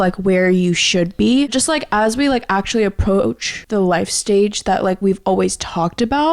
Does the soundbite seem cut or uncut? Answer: cut